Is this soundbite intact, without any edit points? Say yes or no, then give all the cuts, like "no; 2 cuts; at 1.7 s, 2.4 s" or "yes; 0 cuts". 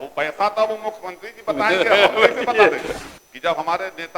no; 1 cut; at 2.9 s